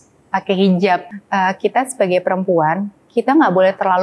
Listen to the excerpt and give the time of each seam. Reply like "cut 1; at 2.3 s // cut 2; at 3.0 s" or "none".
cut 1; at 1.0 s

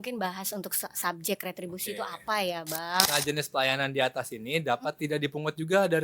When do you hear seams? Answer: cut 1; at 3.1 s

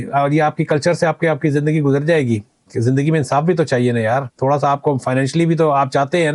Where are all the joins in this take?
none

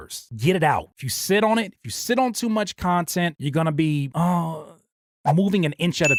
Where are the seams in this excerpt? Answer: none

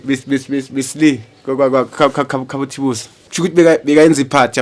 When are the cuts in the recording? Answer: cut 1; at 3.3 s

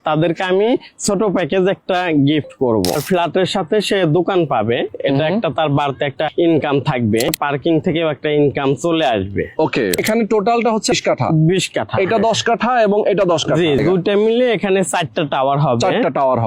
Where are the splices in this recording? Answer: cut 1; at 3.0 s // cut 2; at 6.3 s // cut 3; at 7.3 s // cut 4; at 10.0 s // cut 5; at 10.9 s // cut 6; at 13.8 s

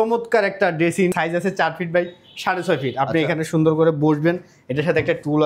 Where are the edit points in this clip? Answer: cut 1; at 1.1 s

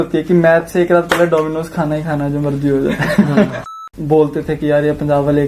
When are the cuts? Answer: cut 1; at 3.7 s

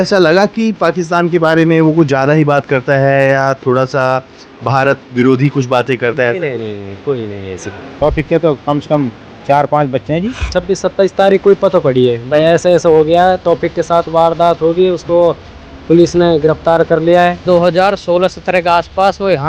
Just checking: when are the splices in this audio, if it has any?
cut 1; at 7.9 s // cut 2; at 10.5 s // cut 3; at 17.4 s

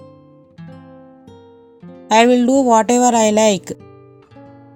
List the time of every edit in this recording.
none

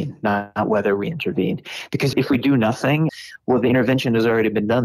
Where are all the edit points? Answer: none

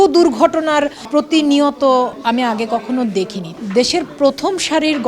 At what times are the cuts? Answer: cut 1; at 1.0 s // cut 2; at 2.2 s // cut 3; at 3.5 s

